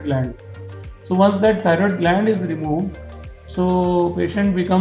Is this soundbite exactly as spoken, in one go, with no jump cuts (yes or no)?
yes